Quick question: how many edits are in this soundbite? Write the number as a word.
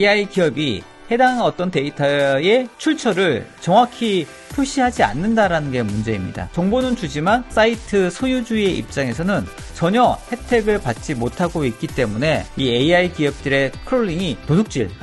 three